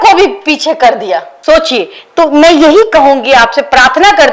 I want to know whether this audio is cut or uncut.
uncut